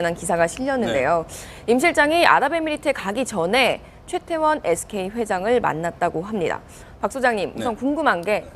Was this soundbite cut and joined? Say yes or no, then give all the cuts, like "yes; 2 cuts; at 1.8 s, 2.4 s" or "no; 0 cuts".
no; 0 cuts